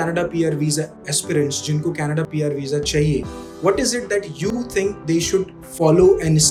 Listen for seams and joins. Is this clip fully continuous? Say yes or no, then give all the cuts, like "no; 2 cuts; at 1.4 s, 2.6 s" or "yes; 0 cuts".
yes; 0 cuts